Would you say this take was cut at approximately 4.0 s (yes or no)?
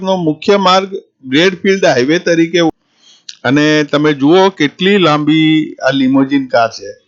no